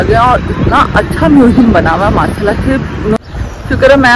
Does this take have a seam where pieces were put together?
yes; 1 cut; at 3.2 s

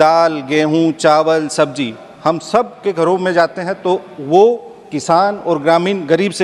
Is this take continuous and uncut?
yes; 0 cuts

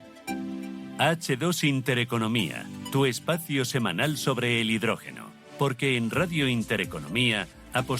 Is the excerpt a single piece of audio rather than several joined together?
no; 1 cut; at 0.9 s

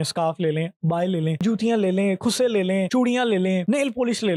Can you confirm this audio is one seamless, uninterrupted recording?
yes; 0 cuts

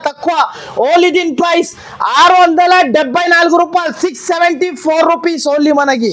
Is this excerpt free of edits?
yes; 0 cuts

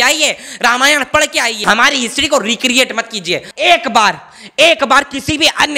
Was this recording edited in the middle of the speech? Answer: yes; 2 cuts; at 1.6 s, 3.5 s

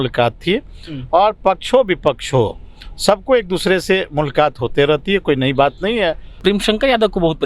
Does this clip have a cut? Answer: yes; 1 cut; at 6.4 s

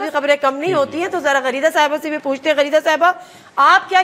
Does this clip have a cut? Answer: no; 0 cuts

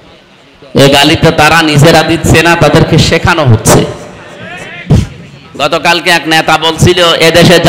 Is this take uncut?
no; 1 cut; at 4.9 s

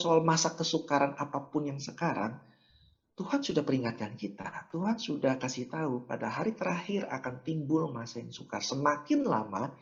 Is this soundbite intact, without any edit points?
yes; 0 cuts

